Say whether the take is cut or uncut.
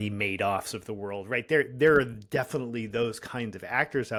uncut